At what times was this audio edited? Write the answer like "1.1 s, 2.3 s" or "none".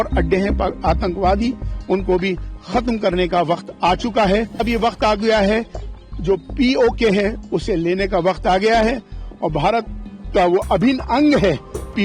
4.6 s